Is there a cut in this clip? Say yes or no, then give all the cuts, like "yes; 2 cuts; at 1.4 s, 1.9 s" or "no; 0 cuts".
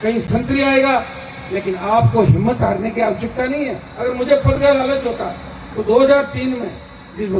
yes; 1 cut; at 3.8 s